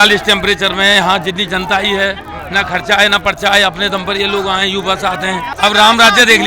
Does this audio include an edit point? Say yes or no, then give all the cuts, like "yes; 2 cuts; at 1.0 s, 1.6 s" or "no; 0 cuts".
yes; 1 cut; at 5.5 s